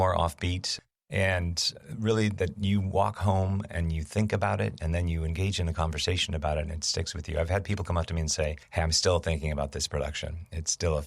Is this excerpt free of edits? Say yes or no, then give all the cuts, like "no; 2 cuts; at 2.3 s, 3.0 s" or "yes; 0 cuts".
no; 1 cut; at 8.6 s